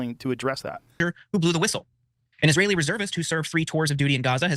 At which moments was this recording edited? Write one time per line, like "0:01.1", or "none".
0:01.0